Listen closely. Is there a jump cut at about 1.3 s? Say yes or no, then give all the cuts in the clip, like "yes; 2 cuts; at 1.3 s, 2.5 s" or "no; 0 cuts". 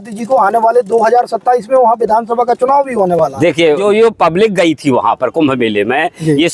no; 1 cut; at 3.8 s